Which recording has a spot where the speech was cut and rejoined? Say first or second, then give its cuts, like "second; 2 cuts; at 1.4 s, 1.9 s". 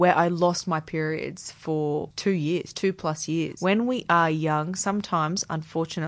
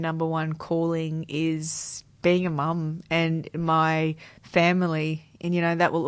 first; 2 cuts; at 2.1 s, 3.5 s